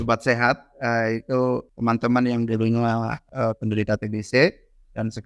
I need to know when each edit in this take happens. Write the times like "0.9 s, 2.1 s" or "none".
1.7 s, 3.2 s